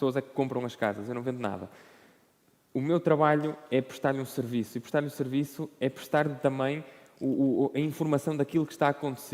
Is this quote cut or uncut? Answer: uncut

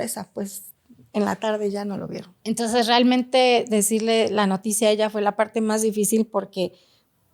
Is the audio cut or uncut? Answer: cut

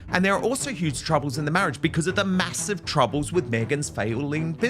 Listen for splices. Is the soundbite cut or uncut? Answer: uncut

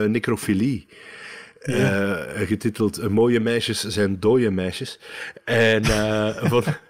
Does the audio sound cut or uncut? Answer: uncut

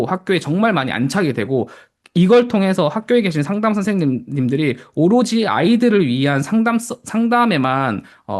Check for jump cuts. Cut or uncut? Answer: uncut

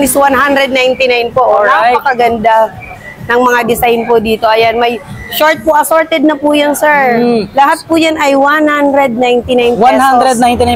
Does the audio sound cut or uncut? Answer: uncut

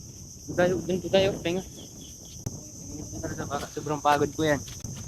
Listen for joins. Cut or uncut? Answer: uncut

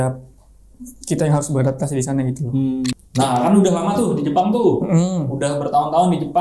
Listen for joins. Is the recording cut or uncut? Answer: cut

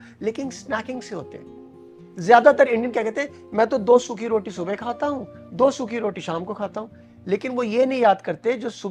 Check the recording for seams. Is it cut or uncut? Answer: uncut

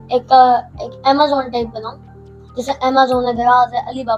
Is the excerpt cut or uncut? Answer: uncut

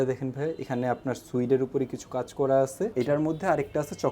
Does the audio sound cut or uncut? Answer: cut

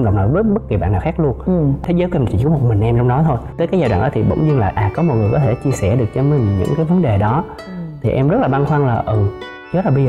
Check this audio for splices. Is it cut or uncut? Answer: cut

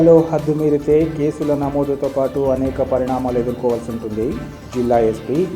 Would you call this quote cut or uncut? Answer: uncut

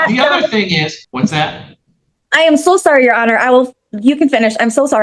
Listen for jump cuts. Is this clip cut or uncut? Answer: cut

